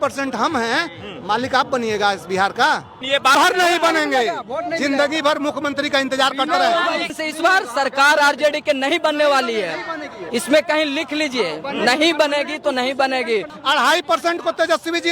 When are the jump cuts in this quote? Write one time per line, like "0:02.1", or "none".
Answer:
0:03.3
0:07.1
0:13.5